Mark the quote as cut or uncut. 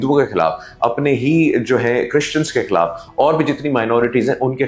uncut